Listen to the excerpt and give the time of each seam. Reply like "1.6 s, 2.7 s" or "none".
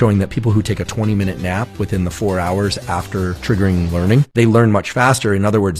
4.3 s